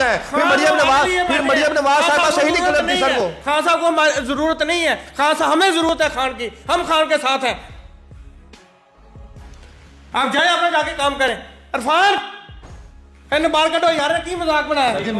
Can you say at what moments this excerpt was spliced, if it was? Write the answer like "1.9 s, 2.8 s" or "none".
none